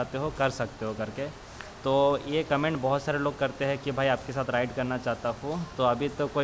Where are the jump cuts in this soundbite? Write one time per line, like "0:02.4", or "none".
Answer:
none